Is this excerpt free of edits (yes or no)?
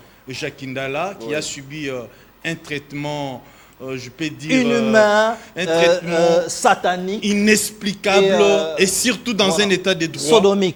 yes